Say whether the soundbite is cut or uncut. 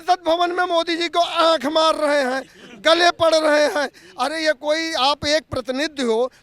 uncut